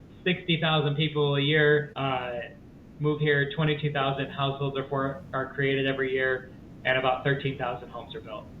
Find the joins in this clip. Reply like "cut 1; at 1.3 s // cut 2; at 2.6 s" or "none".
cut 1; at 1.9 s